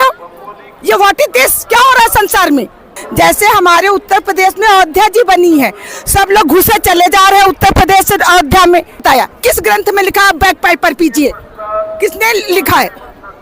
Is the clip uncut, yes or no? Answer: no